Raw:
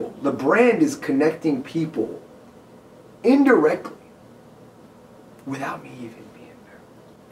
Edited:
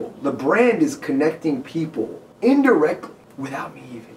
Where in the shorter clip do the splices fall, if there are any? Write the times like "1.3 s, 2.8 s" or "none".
2.2 s, 3.2 s